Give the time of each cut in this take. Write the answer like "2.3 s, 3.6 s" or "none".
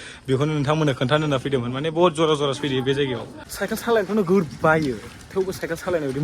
3.4 s